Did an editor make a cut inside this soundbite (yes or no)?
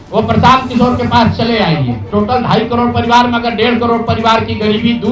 yes